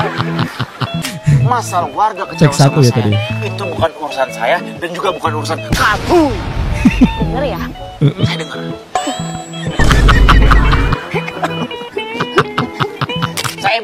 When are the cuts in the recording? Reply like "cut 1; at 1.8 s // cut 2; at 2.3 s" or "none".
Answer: cut 1; at 1.0 s

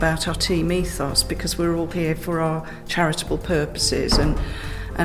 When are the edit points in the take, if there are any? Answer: none

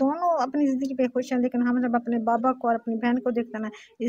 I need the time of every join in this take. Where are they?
none

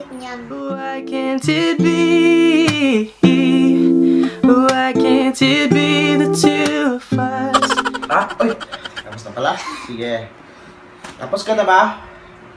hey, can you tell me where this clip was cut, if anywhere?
none

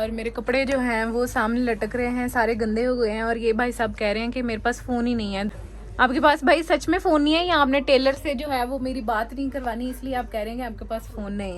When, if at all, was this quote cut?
cut 1; at 5.5 s

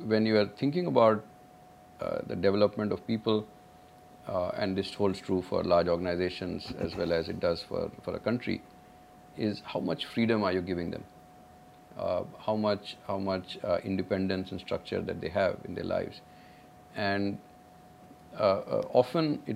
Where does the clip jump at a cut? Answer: none

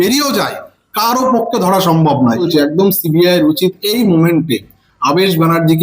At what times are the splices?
cut 1; at 2.5 s

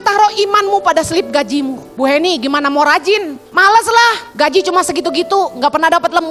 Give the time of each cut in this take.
cut 1; at 1.8 s // cut 2; at 3.4 s // cut 3; at 4.2 s

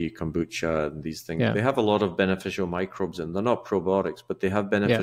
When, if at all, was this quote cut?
none

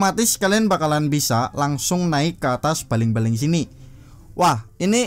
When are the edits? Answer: none

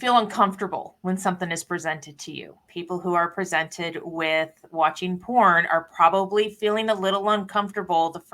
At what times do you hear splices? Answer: cut 1; at 2.6 s

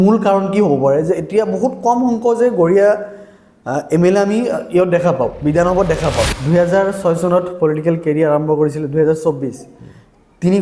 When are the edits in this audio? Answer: cut 1; at 6.4 s

